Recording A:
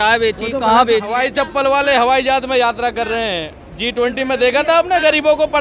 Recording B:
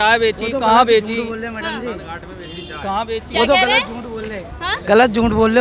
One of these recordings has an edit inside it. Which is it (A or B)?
A